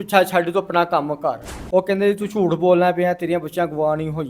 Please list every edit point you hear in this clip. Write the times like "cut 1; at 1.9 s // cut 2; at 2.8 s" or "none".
cut 1; at 1.5 s